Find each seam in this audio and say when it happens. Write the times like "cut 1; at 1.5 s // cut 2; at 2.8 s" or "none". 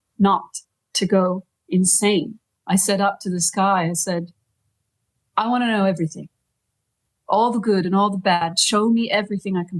cut 1; at 2.5 s